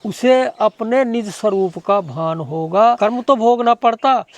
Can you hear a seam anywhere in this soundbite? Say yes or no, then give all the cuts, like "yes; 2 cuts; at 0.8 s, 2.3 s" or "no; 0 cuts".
yes; 1 cut; at 3.0 s